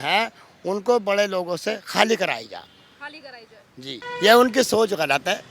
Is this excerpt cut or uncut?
cut